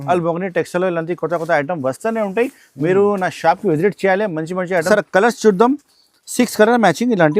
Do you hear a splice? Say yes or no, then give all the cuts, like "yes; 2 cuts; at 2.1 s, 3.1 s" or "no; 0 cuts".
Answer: yes; 1 cut; at 4.8 s